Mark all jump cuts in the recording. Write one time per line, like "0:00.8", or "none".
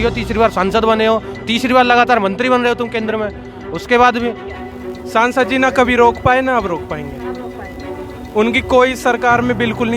0:04.5